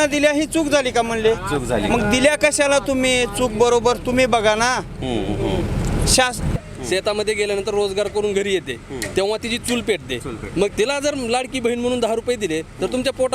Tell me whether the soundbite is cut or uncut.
cut